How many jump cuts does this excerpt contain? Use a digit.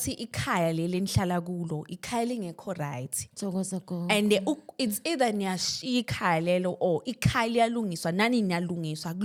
0